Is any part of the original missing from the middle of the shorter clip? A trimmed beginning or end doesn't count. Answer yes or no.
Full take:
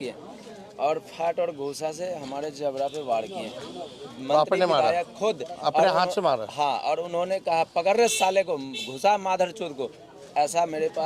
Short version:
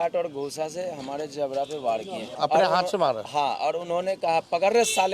yes